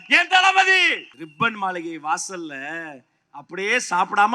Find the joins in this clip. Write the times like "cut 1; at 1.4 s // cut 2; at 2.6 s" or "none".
cut 1; at 1.2 s